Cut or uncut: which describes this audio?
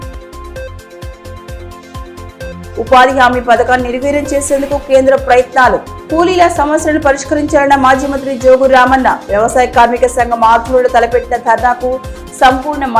uncut